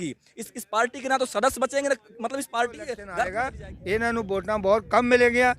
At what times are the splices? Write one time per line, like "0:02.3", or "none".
0:03.3